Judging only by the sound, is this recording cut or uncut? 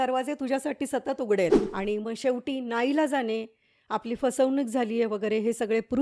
cut